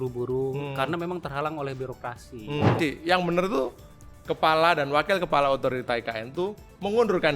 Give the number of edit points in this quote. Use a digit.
1